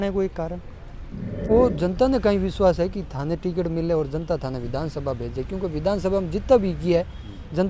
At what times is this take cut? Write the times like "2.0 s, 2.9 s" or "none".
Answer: 1.5 s